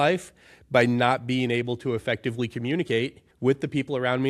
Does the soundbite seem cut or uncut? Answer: cut